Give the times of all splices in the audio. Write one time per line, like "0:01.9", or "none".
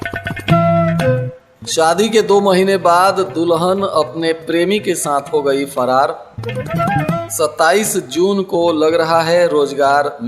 0:01.4